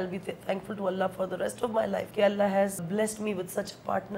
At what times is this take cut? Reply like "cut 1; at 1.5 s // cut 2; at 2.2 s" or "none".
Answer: cut 1; at 2.1 s // cut 2; at 2.9 s